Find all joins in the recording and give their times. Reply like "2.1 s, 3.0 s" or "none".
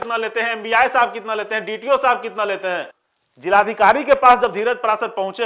none